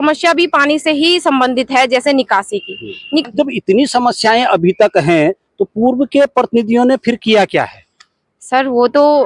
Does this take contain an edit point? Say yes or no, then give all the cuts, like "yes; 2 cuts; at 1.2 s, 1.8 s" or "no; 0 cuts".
yes; 1 cut; at 3.2 s